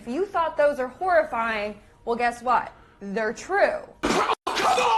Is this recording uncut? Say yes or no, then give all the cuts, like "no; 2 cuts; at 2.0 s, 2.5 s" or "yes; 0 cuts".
no; 1 cut; at 3.9 s